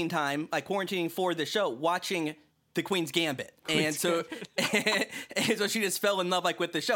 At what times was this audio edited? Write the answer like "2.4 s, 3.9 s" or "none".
none